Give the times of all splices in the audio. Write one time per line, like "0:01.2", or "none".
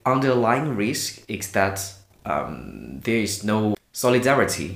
0:03.8

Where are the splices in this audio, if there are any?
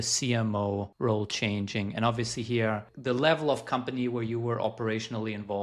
0:00.9
0:02.9

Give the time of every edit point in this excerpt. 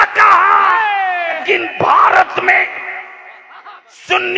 0:01.4

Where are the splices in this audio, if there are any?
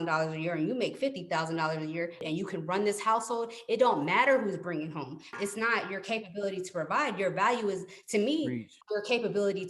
0:02.2
0:05.3
0:08.8

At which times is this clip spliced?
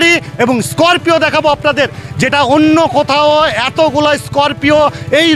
none

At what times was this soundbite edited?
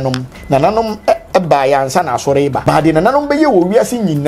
0:02.6

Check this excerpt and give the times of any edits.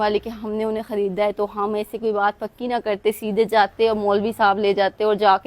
none

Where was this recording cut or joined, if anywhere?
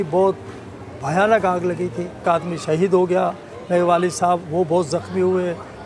0:02.2

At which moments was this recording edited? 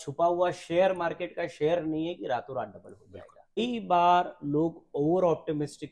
0:03.6

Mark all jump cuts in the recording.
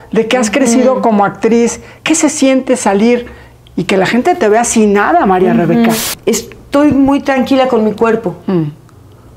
0:06.1

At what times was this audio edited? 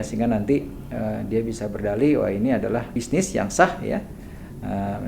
0:02.9

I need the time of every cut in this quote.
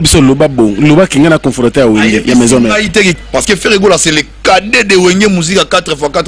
0:03.2

